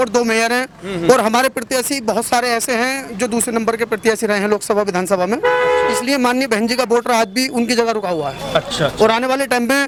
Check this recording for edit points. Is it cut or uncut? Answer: uncut